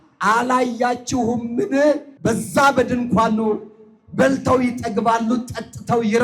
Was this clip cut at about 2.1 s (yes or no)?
yes